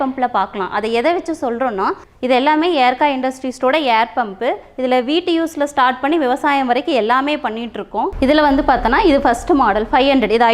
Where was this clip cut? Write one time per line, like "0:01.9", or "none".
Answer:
0:02.1
0:08.1